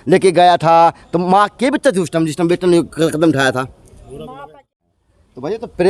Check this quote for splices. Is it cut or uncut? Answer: cut